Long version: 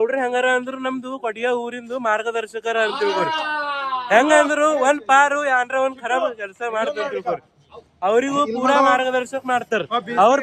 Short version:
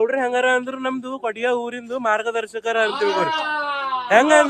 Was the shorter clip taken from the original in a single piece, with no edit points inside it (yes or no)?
yes